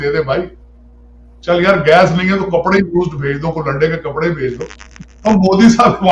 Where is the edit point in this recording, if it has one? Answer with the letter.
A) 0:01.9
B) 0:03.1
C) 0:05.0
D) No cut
D